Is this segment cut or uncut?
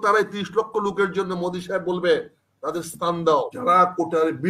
cut